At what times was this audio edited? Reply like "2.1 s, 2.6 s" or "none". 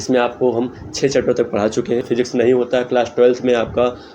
2.1 s